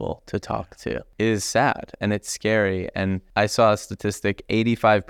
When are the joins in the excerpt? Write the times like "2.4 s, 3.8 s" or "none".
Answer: 1.1 s, 3.2 s